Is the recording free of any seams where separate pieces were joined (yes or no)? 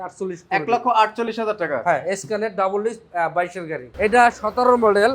no